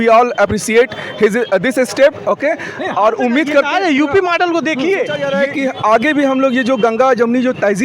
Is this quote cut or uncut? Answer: cut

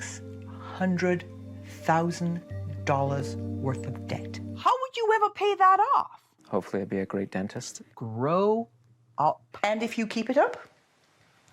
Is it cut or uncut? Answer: cut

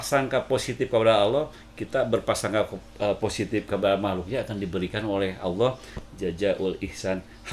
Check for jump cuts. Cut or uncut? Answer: uncut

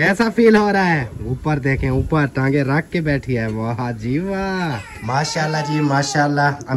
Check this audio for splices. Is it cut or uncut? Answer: cut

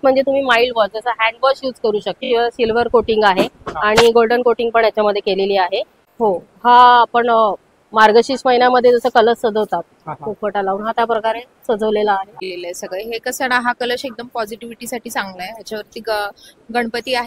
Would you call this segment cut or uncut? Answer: cut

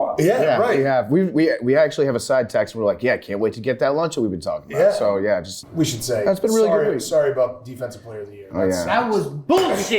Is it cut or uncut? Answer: cut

